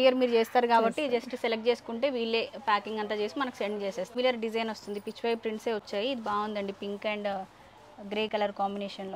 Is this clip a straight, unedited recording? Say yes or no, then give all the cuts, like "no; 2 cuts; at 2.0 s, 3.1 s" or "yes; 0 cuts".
no; 1 cut; at 4.1 s